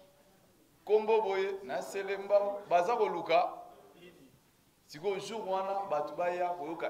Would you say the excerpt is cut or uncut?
uncut